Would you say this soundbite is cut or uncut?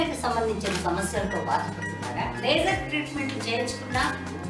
uncut